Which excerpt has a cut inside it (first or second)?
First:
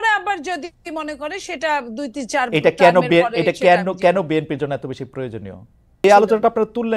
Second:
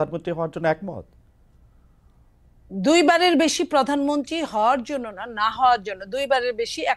first